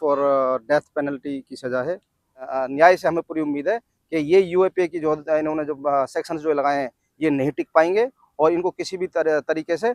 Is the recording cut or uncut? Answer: cut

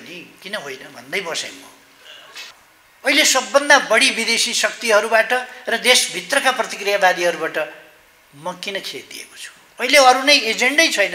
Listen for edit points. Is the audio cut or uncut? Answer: cut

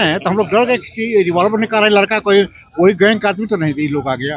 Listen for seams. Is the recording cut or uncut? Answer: uncut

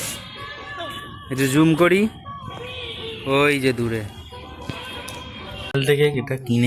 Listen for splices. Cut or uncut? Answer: cut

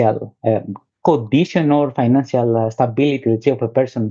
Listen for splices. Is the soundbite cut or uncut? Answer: uncut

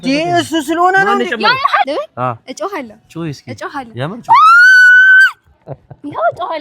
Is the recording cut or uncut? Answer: cut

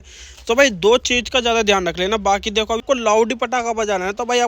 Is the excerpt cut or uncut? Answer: cut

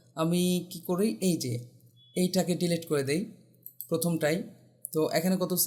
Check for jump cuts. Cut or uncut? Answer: uncut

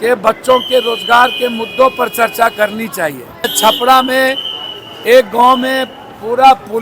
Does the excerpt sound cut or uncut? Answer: cut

